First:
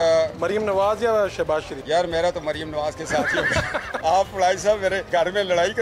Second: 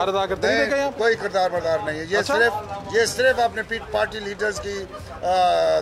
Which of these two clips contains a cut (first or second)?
first